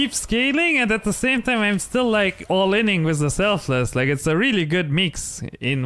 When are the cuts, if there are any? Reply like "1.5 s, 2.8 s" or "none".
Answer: none